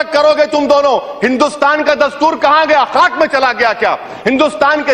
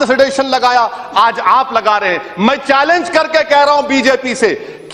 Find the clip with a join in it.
first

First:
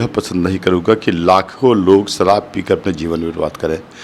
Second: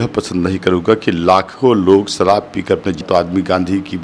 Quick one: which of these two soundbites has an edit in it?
second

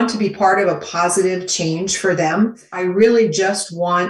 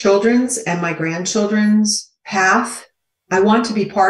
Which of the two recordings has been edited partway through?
first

